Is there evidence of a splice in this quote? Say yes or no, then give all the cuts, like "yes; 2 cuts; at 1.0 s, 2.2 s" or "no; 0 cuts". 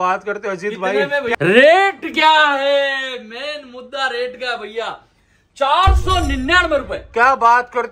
yes; 1 cut; at 1.3 s